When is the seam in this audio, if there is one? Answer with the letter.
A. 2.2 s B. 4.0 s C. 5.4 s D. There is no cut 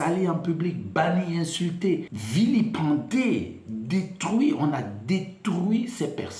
A